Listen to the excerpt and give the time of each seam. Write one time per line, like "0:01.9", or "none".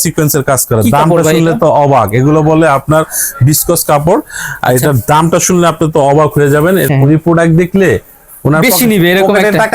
0:06.9